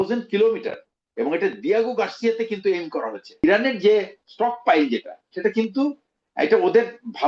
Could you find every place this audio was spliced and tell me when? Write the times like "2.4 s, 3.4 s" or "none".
3.4 s, 4.2 s

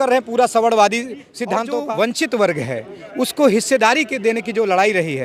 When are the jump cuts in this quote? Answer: 1.7 s

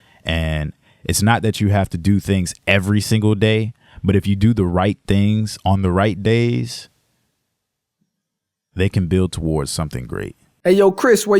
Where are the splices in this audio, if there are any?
10.5 s

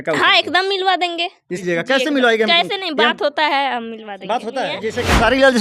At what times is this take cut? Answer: 1.6 s, 4.8 s

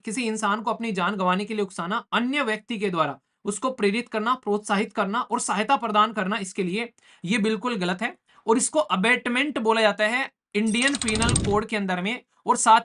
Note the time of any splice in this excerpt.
none

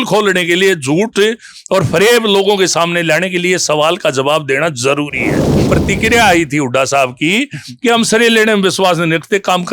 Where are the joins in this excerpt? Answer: 5.7 s

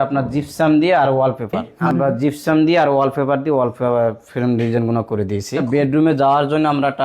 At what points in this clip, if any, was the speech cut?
1.7 s, 5.6 s

